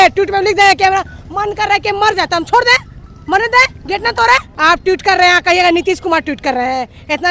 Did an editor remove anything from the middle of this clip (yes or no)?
yes